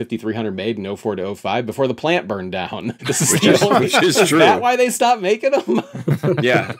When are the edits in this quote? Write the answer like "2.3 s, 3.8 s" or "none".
2.9 s